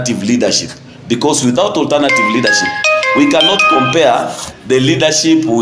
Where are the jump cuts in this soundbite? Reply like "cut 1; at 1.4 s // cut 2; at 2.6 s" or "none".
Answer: none